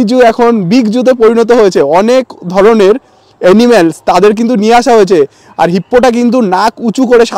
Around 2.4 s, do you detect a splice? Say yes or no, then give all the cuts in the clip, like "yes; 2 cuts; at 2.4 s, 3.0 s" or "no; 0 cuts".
no; 0 cuts